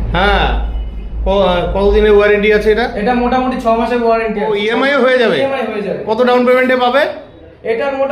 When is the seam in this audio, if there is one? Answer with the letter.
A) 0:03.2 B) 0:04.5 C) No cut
B